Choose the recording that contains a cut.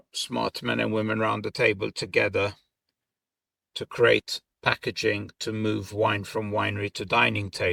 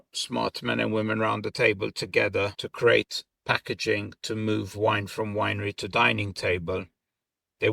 second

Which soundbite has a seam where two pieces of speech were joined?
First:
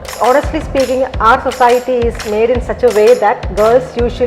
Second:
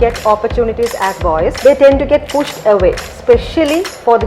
second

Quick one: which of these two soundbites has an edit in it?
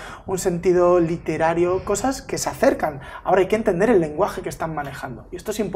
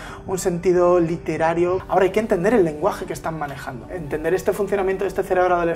second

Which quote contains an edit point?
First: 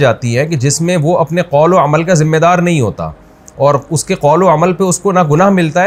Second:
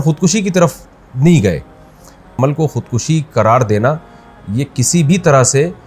second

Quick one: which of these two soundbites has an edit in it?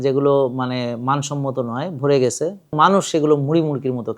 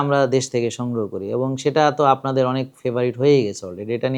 first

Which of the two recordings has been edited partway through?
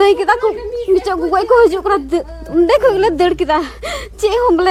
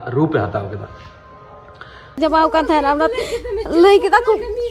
second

